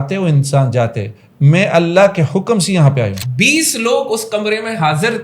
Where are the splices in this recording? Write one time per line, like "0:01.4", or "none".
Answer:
0:03.2